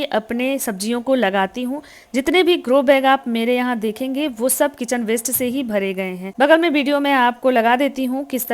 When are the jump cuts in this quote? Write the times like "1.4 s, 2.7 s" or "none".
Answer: 6.2 s